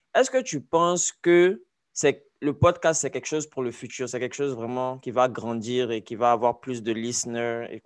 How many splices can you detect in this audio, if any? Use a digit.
0